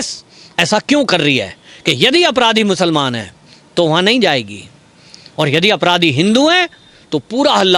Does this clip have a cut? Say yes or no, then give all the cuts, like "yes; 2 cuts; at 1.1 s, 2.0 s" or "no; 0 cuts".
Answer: no; 0 cuts